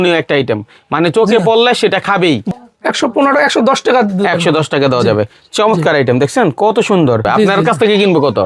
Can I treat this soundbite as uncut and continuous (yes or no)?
no